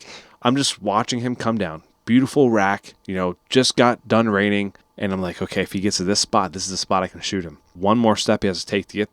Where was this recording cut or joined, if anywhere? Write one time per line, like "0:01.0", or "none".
0:04.8
0:07.7